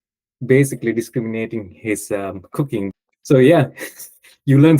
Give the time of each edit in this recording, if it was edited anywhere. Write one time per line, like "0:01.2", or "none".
0:02.9